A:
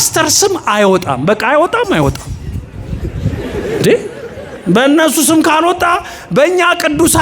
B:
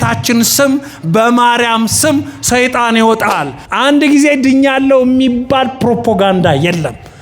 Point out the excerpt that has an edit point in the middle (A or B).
B